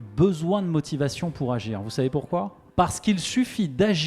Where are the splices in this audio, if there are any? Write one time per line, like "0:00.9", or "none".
0:02.6

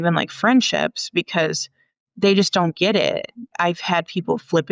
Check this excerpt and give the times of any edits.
0:03.5

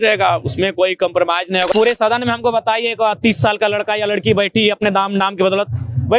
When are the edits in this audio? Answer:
0:01.7

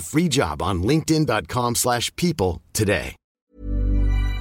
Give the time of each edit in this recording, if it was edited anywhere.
0:03.5

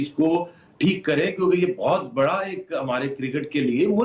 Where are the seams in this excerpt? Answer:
none

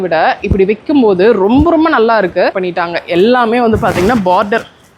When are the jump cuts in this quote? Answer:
0:02.6

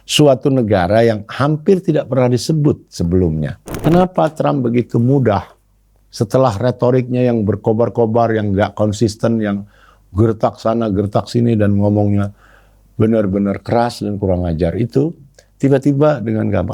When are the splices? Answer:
0:03.8

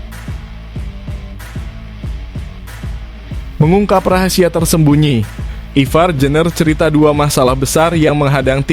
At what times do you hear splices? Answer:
none

